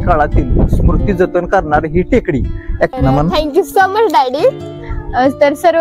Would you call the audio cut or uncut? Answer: cut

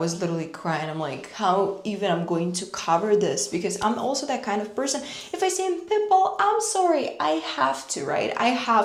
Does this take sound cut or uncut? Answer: uncut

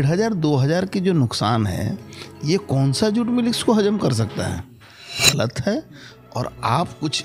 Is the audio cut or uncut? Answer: cut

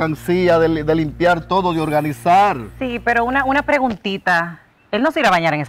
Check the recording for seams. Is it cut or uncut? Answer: uncut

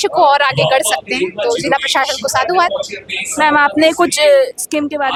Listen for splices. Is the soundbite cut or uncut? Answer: uncut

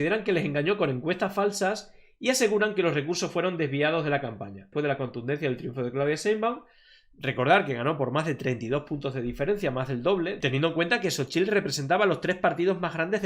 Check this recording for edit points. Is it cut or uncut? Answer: cut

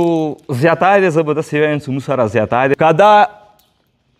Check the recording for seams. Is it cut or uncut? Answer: cut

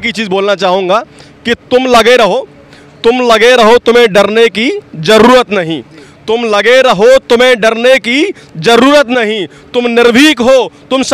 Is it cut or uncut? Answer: uncut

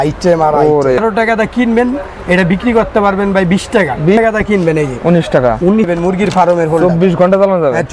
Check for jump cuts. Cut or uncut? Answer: cut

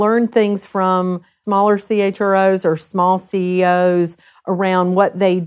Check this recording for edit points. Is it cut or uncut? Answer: cut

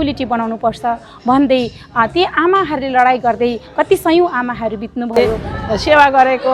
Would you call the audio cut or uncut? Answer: cut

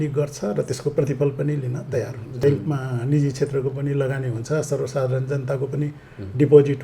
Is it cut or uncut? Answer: cut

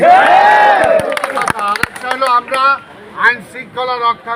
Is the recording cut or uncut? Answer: uncut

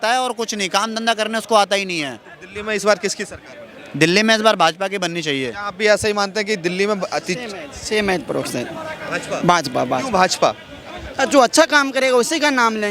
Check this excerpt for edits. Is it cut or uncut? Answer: uncut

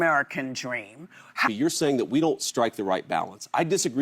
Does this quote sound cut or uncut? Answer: cut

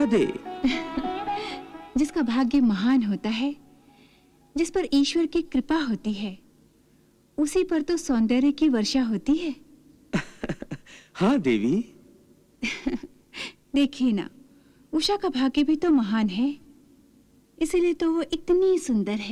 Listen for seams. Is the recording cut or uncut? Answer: uncut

